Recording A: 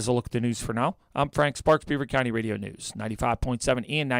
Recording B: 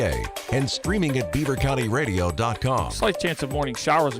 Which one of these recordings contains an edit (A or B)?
B